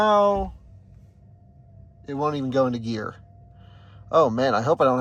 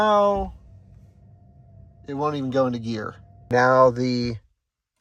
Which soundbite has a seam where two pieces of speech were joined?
second; 1 cut; at 3.5 s

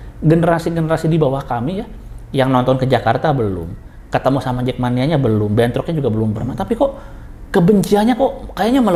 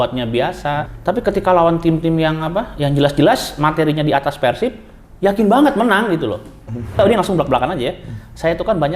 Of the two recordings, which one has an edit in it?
second; 2 cuts; at 0.9 s, 7.0 s

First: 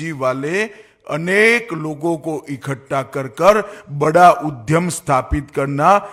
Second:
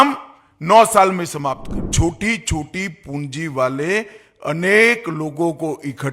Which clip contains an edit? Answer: second; 1 cut; at 1.8 s

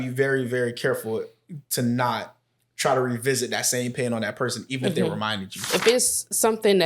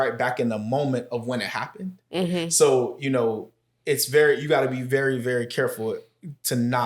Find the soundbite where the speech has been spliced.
first; 1 cut; at 5.6 s

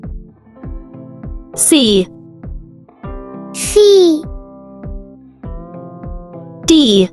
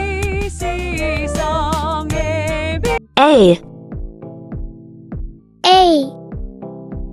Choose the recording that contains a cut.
second; 3 cuts; at 3.7 s, 5.2 s, 6.4 s

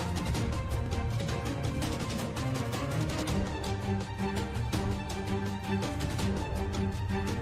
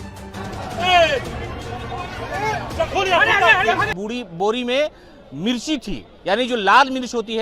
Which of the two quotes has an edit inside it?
second; 1 cut; at 3.9 s

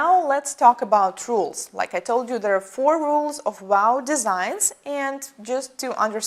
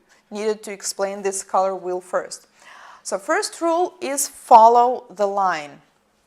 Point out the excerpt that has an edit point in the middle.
second; 1 cut; at 2.9 s

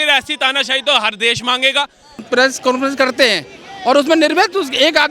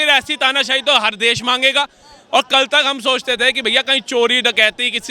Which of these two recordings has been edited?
first; 1 cut; at 2.2 s

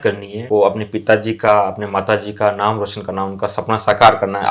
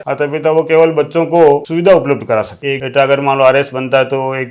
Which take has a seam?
second; 1 cut; at 2.6 s

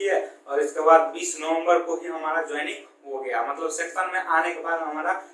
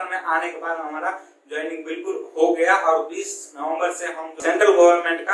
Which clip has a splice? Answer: second; 1 cut; at 4.4 s

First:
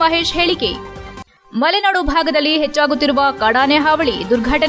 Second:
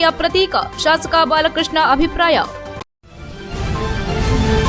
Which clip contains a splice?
second; 1 cut; at 2.8 s

